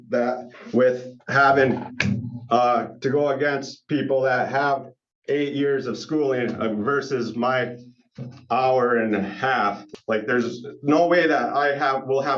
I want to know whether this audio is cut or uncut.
cut